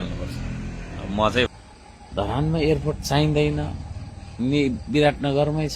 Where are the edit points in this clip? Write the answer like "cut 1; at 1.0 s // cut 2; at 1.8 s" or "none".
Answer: cut 1; at 1.5 s